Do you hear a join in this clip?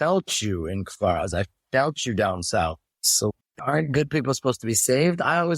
yes; 1 cut; at 3.3 s

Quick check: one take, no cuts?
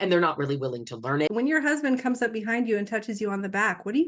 no; 1 cut; at 1.3 s

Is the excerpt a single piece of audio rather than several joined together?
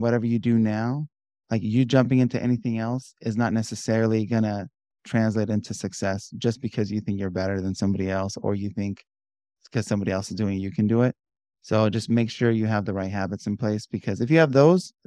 yes; 0 cuts

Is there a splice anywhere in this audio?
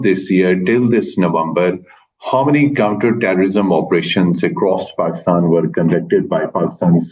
no; 0 cuts

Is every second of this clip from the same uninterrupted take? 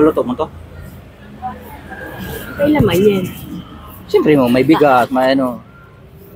yes; 0 cuts

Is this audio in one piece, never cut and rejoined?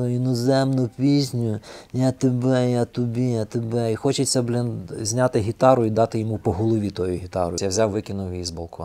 no; 1 cut; at 7.6 s

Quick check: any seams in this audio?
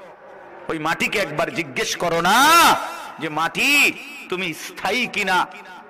no; 0 cuts

